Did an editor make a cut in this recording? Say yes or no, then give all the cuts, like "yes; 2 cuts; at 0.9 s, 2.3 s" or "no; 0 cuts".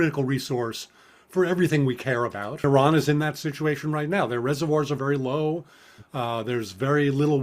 yes; 1 cut; at 2.6 s